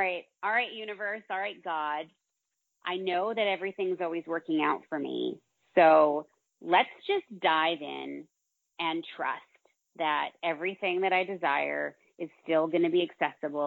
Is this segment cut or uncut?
uncut